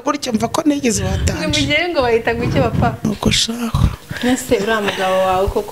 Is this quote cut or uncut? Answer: cut